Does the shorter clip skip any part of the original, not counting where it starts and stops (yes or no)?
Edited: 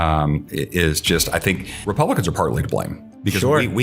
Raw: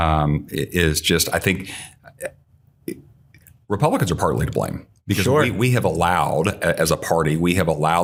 yes